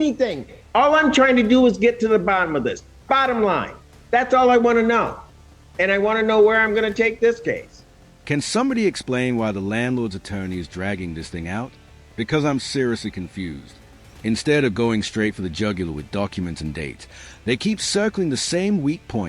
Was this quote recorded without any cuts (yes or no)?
yes